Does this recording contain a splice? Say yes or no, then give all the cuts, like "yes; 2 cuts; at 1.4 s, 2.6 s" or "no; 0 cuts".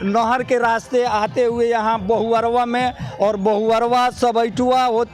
no; 0 cuts